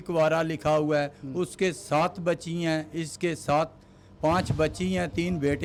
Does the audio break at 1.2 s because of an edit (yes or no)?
no